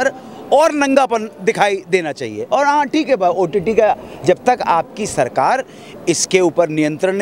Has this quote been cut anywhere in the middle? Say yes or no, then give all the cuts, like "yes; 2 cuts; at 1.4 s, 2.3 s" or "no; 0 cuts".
no; 0 cuts